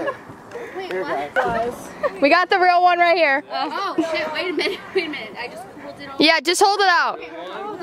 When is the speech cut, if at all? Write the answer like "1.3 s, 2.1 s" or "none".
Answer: 1.4 s